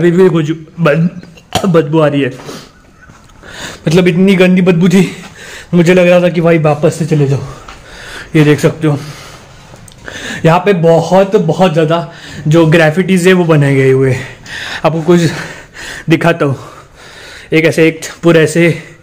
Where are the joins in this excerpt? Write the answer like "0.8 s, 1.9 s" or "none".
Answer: none